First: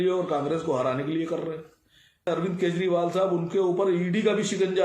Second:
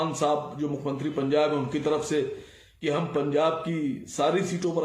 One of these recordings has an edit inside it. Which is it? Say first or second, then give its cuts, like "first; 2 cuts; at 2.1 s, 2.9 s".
first; 1 cut; at 2.3 s